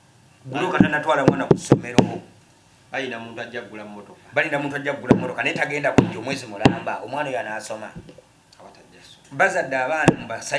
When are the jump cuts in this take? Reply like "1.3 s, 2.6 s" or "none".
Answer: none